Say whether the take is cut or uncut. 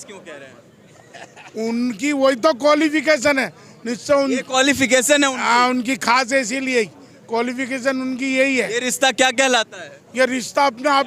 uncut